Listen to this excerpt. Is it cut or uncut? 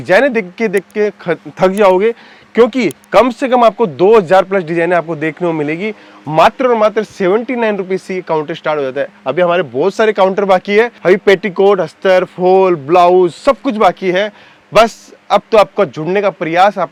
uncut